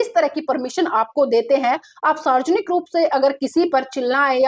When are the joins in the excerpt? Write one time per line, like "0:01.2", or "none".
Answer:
none